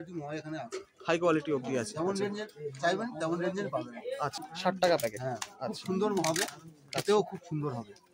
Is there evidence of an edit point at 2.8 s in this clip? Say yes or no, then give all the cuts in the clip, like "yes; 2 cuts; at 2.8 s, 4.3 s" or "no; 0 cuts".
no; 1 cut; at 4.5 s